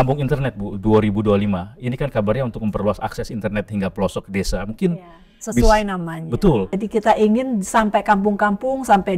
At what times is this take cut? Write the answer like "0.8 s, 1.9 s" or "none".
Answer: 6.8 s